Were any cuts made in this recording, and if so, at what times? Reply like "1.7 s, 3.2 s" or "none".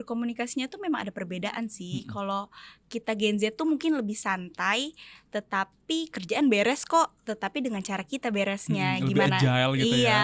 none